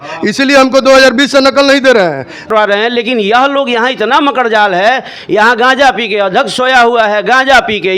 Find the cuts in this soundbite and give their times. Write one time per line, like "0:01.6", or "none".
0:02.4